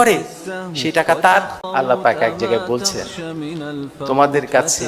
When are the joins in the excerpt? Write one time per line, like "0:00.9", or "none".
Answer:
0:01.6